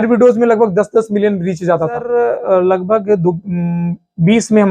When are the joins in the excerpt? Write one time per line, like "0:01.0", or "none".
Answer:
0:02.0